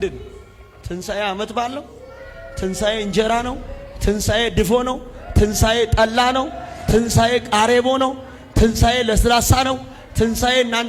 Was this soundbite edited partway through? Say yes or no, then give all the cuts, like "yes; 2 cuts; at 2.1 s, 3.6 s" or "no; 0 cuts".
no; 0 cuts